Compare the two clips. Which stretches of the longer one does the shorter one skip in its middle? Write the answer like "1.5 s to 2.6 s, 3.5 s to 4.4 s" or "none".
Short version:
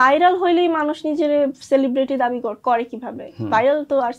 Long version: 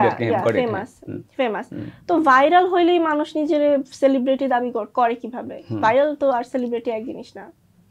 none